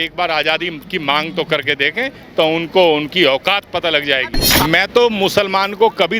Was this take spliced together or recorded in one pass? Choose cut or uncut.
cut